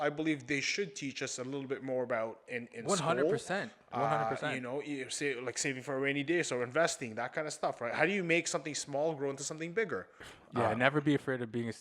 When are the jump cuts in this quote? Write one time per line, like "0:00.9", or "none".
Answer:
0:10.2